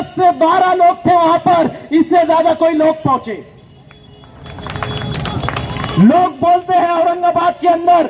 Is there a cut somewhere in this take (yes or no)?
no